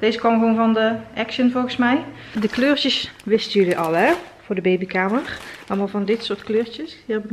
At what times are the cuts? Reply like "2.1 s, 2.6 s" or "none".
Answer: 2.2 s